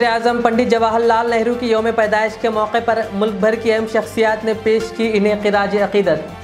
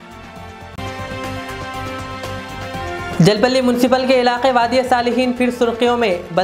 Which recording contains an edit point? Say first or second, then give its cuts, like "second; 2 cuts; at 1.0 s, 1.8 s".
second; 2 cuts; at 0.7 s, 3.1 s